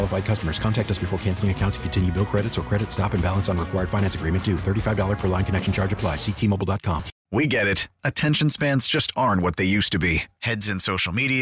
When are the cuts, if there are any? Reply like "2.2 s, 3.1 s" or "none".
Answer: 7.1 s